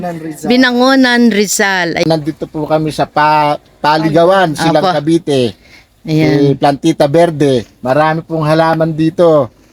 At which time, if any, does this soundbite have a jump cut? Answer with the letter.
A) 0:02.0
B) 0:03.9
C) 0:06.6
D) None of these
A